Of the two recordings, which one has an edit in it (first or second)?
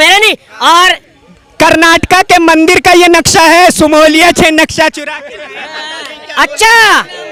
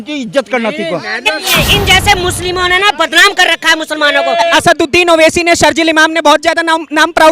second